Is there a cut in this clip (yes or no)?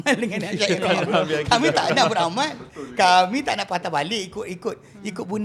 no